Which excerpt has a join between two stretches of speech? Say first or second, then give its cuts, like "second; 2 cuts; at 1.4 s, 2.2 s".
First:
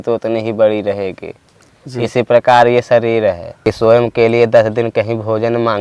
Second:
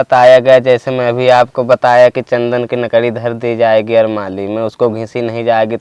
first; 1 cut; at 3.5 s